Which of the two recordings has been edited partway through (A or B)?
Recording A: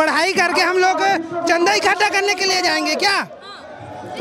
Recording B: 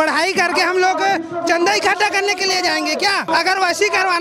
B